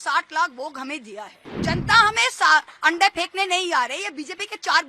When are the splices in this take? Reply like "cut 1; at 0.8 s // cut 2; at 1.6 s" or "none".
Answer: cut 1; at 1.6 s

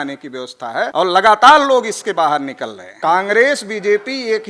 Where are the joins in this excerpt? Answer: cut 1; at 0.9 s // cut 2; at 2.8 s

